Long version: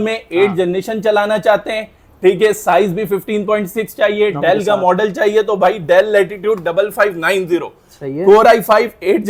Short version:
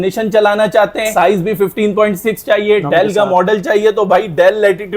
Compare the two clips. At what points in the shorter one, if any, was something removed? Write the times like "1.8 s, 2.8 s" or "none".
1.1 s